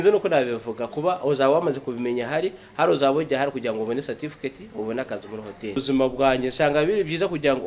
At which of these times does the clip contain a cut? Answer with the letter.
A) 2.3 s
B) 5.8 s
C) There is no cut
B